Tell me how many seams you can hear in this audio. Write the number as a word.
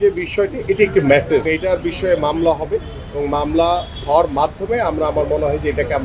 one